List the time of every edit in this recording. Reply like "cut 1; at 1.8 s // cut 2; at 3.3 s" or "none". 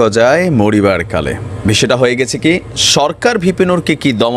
none